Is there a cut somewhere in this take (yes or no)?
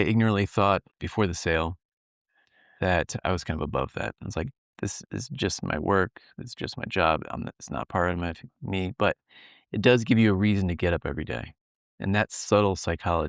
yes